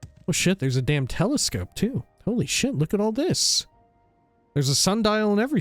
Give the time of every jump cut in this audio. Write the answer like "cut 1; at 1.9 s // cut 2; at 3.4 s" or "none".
cut 1; at 2.1 s